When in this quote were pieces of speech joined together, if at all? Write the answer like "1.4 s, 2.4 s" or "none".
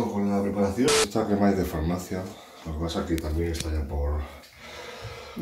0.9 s